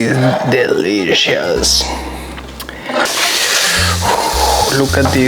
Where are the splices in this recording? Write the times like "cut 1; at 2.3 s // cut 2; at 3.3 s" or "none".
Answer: cut 1; at 3.1 s